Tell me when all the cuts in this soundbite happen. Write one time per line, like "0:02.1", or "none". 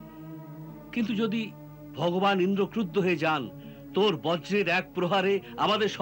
none